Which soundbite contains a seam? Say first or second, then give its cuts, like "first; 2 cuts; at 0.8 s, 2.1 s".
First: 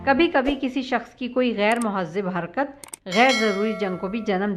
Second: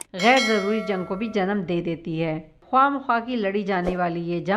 second; 1 cut; at 2.6 s